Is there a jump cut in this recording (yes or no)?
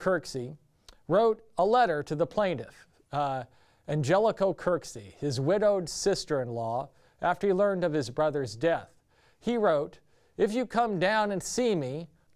yes